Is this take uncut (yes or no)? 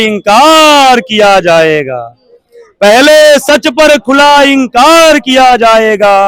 yes